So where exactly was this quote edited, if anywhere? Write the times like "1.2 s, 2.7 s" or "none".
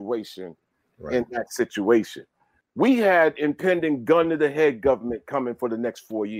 2.6 s